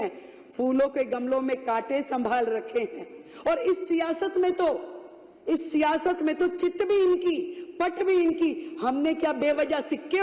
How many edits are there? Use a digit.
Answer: 0